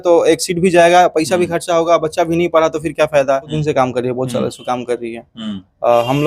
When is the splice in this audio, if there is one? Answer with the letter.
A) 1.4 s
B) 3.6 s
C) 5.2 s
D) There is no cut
B